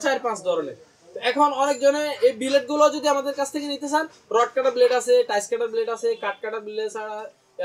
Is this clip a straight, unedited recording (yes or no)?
yes